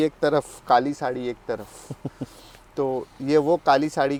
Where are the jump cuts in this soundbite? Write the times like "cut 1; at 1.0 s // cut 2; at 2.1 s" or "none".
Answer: none